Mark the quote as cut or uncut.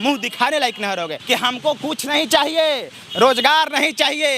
cut